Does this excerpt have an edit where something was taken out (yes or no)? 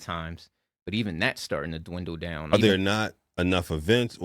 yes